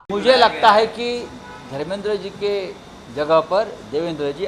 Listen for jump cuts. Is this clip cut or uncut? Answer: uncut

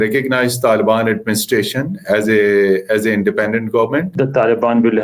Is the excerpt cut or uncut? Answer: cut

